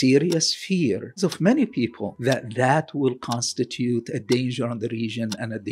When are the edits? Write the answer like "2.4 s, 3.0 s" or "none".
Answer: 2.1 s